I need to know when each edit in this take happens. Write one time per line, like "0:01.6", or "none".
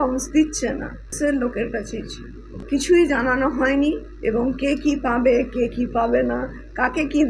0:01.2
0:02.6